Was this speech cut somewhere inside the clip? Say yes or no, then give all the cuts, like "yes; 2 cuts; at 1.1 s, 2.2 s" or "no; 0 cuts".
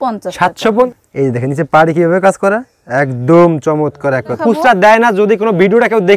yes; 2 cuts; at 0.9 s, 4.4 s